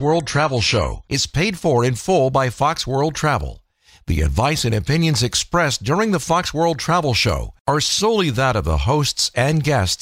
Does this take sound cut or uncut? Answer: cut